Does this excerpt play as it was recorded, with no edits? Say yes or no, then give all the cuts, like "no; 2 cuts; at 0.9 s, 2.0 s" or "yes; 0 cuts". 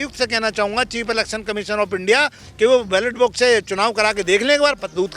yes; 0 cuts